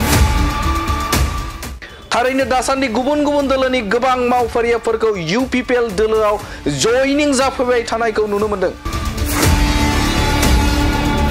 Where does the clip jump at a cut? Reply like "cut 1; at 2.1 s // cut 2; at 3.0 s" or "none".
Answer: cut 1; at 1.4 s